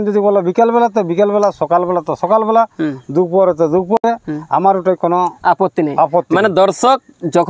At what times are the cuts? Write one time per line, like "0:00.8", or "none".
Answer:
none